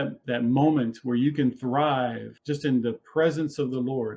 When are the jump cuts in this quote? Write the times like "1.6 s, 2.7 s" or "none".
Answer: 2.3 s